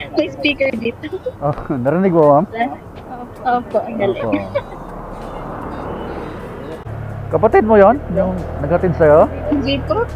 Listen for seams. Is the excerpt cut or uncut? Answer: cut